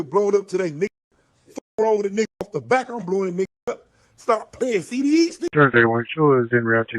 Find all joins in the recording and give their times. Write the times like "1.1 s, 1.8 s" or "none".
5.4 s